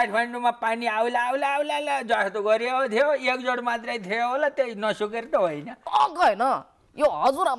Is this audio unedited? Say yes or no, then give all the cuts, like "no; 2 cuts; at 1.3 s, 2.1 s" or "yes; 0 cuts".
no; 1 cut; at 5.7 s